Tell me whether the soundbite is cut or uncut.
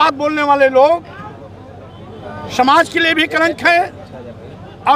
uncut